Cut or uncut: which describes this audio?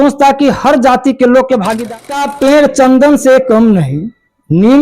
cut